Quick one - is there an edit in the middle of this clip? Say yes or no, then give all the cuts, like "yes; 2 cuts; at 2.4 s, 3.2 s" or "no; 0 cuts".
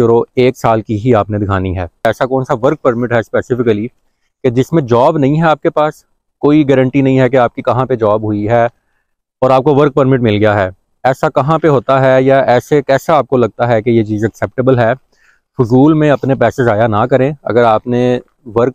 yes; 1 cut; at 2.1 s